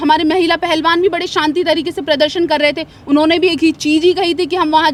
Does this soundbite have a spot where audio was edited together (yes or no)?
no